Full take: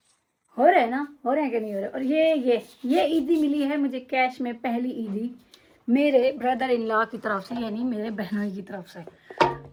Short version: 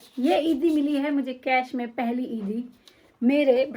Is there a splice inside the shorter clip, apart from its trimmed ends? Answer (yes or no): no